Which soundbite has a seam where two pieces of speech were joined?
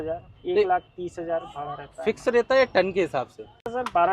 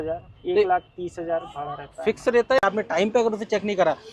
second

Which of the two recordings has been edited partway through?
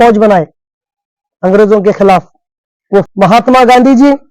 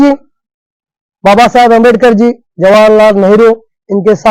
first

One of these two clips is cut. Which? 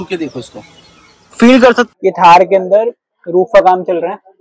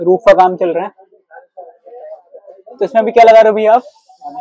first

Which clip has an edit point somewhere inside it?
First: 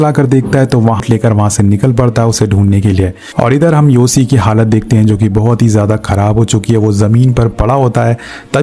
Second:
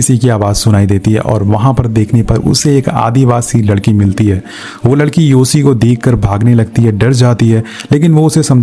first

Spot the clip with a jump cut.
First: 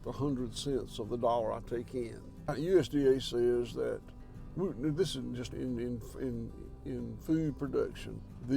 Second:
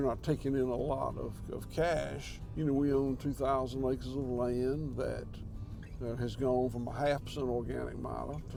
first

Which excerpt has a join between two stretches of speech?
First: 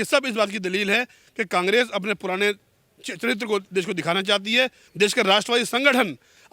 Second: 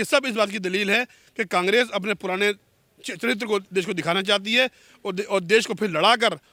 first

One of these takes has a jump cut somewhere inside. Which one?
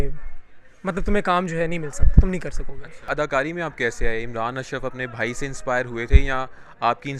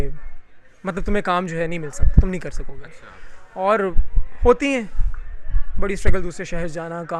first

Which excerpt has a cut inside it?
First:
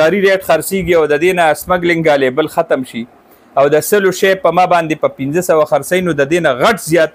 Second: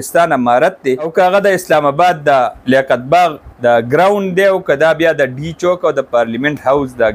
second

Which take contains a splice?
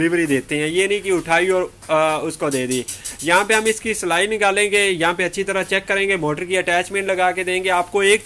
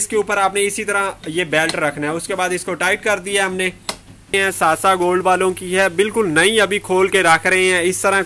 second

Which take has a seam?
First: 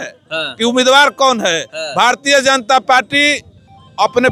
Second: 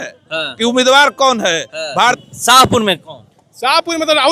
second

